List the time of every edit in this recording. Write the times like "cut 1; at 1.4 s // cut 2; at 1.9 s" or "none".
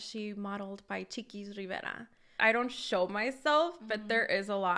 cut 1; at 2.3 s